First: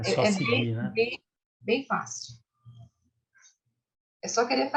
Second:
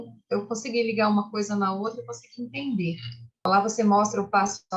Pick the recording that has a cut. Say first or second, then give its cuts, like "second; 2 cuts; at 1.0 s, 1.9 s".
second; 1 cut; at 3.5 s